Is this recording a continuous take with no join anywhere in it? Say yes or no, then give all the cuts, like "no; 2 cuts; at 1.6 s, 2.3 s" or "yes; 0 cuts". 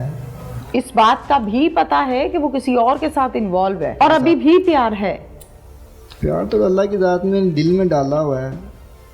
no; 1 cut; at 4.0 s